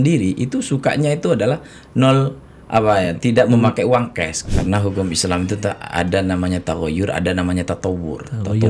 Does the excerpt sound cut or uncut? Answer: cut